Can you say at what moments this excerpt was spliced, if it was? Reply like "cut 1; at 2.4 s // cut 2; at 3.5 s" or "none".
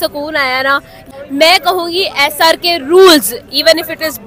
cut 1; at 0.9 s

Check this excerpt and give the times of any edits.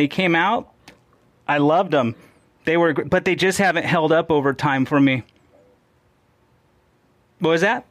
cut 1; at 6.0 s

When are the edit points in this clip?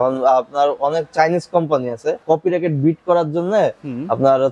cut 1; at 2.2 s

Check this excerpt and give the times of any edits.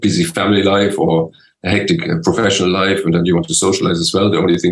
none

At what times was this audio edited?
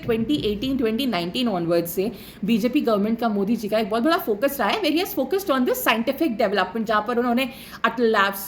none

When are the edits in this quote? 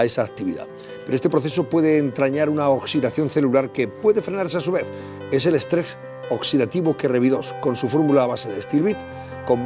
cut 1; at 4.2 s

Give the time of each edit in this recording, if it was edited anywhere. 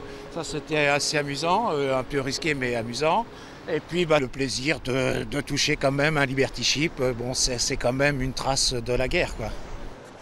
cut 1; at 3.2 s

